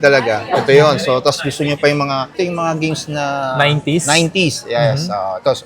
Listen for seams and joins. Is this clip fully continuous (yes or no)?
yes